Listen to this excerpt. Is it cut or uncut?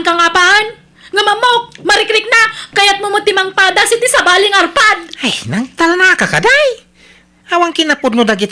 cut